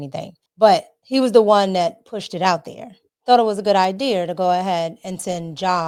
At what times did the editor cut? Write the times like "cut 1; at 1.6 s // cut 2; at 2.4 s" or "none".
none